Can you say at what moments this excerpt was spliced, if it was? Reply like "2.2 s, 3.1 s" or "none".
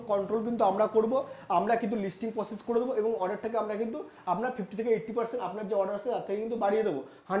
none